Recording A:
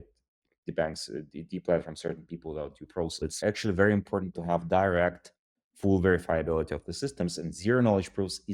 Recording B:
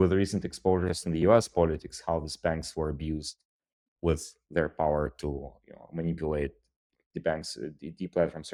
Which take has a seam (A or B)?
A